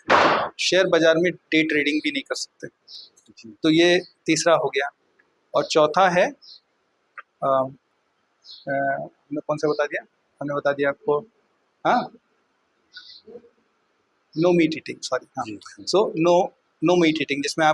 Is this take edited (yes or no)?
no